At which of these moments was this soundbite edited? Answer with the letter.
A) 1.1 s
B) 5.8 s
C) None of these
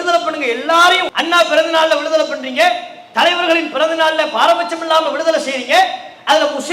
A